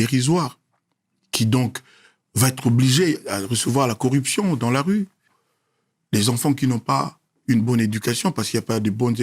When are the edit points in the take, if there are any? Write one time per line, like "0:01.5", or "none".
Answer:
0:05.3